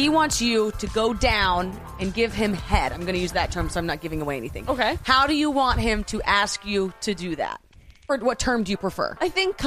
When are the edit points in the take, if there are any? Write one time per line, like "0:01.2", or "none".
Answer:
0:08.1